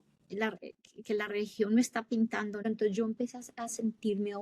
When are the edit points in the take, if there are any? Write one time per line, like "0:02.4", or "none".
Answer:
0:02.7